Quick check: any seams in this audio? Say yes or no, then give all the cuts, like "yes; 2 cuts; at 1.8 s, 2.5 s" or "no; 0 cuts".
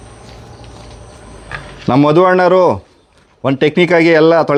no; 0 cuts